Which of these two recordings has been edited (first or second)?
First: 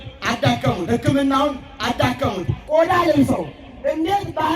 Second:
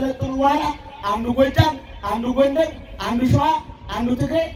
first